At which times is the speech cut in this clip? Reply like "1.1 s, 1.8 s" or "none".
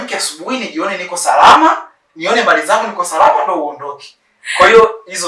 none